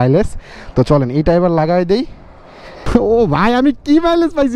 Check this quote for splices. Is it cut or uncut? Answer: cut